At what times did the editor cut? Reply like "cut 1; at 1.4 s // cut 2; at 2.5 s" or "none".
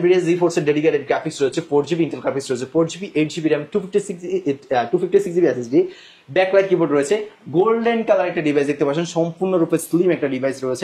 none